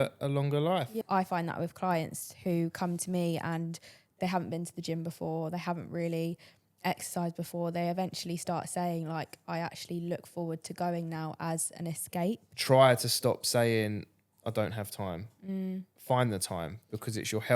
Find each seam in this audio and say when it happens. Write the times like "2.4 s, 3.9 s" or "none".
1.0 s, 12.5 s